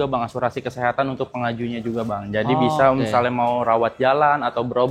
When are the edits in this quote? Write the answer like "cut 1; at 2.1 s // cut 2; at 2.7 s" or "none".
none